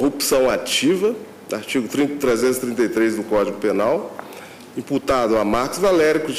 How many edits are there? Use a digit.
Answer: 0